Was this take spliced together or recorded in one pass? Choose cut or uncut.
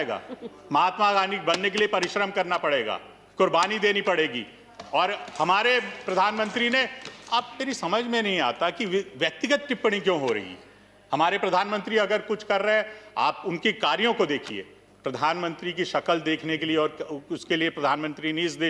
uncut